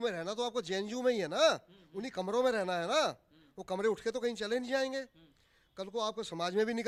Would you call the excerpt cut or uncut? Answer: uncut